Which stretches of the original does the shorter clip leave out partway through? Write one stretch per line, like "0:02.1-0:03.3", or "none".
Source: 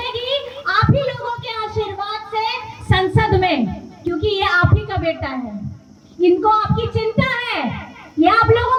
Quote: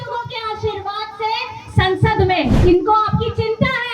0:03.7-0:06.1